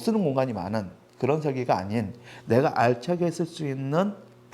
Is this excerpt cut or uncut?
uncut